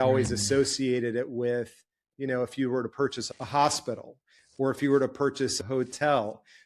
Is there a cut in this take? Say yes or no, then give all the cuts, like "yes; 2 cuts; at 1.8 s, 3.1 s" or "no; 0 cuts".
yes; 1 cut; at 5.6 s